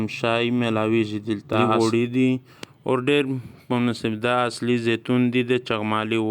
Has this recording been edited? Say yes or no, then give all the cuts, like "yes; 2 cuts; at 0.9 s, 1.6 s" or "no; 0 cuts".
yes; 1 cut; at 1.6 s